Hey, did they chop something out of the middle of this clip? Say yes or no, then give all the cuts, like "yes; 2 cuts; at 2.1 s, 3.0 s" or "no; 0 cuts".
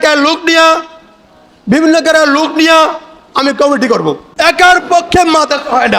yes; 1 cut; at 4.2 s